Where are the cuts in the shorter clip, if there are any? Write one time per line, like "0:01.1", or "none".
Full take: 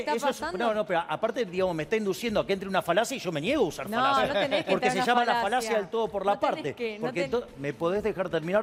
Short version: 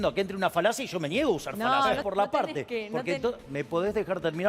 0:02.0